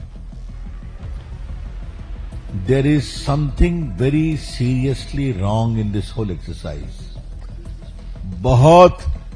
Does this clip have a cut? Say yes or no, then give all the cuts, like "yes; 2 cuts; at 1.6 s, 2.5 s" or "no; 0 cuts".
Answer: no; 0 cuts